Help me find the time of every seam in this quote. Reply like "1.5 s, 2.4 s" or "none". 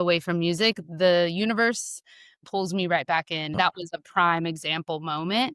none